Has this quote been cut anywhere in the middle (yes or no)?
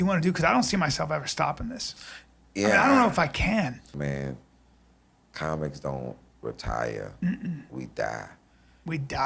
yes